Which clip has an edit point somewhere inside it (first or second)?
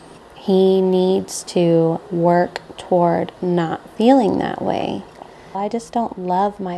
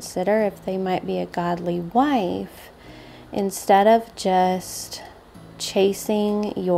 first